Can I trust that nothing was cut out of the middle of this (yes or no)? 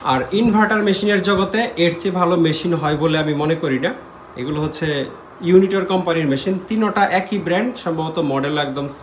yes